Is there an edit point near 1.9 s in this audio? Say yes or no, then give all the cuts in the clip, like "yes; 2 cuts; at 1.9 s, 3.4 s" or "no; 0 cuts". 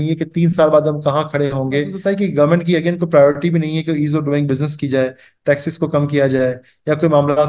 yes; 1 cut; at 1.9 s